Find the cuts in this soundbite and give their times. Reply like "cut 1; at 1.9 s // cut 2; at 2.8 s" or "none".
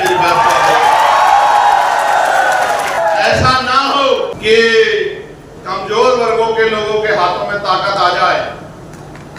cut 1; at 3.0 s // cut 2; at 4.4 s

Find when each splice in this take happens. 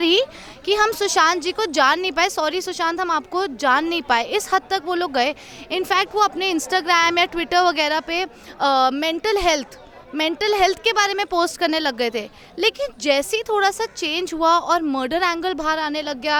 none

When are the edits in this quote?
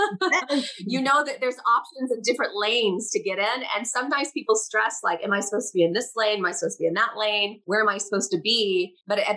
none

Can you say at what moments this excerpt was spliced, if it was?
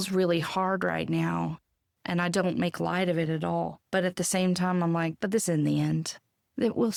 none

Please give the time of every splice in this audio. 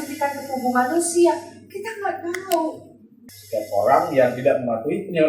cut 1; at 3.1 s

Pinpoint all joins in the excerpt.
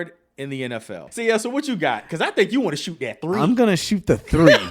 cut 1; at 1.1 s

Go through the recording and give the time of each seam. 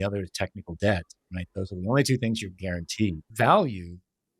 cut 1; at 3.2 s

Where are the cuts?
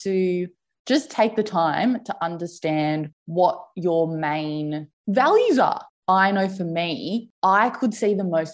cut 1; at 3.2 s // cut 2; at 5.9 s // cut 3; at 7.3 s

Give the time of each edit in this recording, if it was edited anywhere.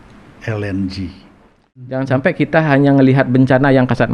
cut 1; at 2.0 s

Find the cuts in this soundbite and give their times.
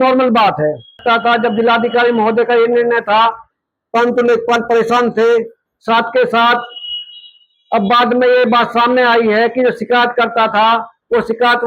cut 1; at 1.0 s

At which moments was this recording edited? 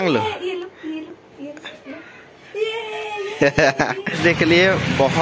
cut 1; at 4.2 s

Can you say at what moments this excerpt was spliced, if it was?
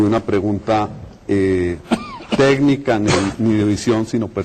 cut 1; at 1.0 s

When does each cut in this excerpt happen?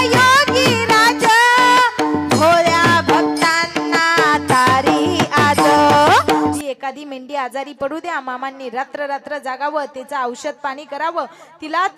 cut 1; at 6.6 s

